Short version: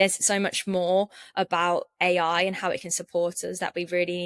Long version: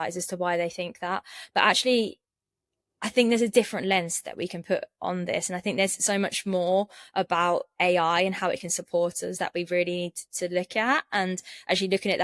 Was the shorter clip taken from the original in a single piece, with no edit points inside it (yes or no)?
yes